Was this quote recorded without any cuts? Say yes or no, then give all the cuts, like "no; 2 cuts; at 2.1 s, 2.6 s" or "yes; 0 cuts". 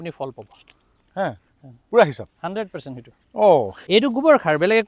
no; 1 cut; at 3.8 s